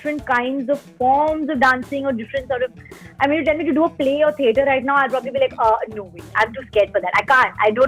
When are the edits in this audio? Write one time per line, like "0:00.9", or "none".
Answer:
none